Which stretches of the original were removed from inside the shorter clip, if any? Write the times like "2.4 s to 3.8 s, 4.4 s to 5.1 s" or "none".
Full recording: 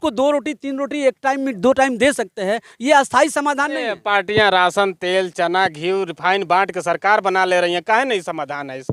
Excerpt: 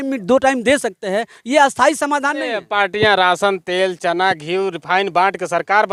none